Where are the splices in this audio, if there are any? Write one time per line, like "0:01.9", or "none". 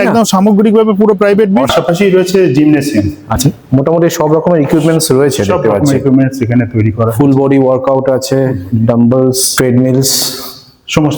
0:01.7
0:03.4
0:09.5

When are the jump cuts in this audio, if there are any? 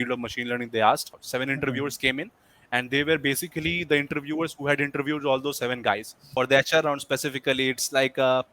0:01.2
0:06.3

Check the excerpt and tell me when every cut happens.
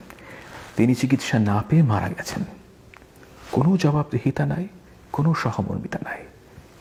none

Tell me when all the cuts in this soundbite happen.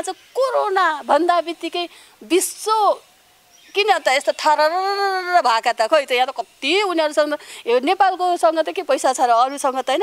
none

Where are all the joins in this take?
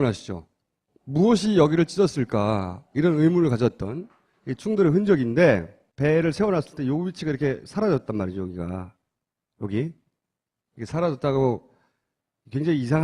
0:10.1

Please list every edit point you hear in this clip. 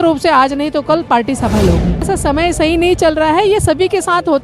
0:02.1

